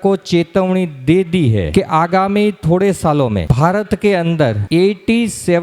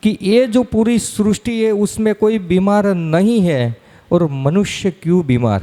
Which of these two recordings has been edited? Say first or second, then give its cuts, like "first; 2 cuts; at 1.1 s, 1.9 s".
first; 3 cuts; at 1.7 s, 3.4 s, 4.6 s